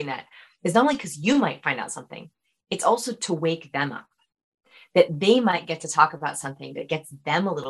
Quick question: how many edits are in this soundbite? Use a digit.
0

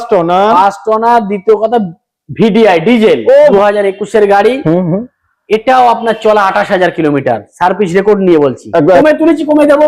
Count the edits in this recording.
2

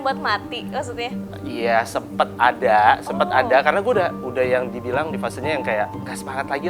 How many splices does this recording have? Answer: 0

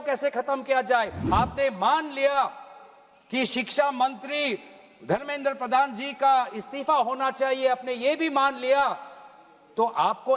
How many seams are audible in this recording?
1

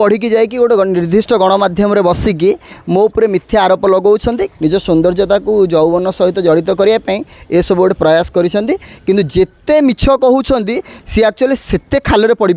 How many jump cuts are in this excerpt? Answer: 1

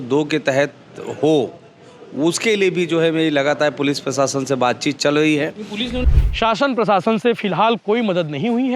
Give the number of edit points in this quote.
1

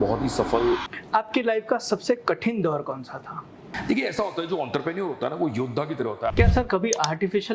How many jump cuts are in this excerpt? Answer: 3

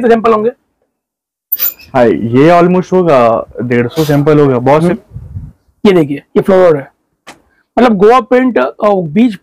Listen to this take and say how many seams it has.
1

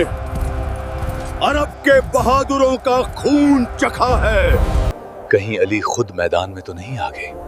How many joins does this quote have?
1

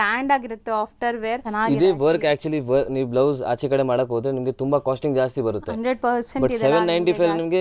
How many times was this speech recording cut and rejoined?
1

